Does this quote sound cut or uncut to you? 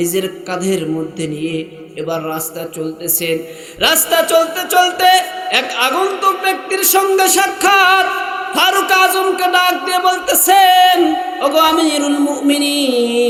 uncut